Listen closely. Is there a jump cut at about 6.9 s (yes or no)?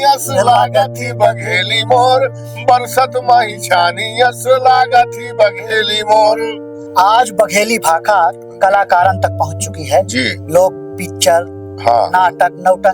yes